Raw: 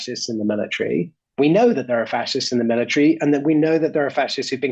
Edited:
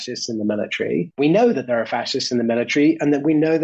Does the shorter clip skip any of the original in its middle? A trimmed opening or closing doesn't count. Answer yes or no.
yes